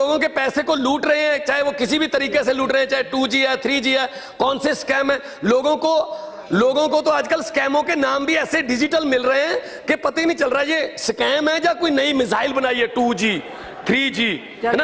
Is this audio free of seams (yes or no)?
yes